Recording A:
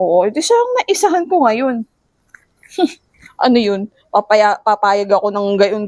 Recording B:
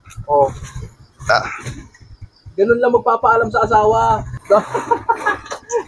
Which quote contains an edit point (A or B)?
B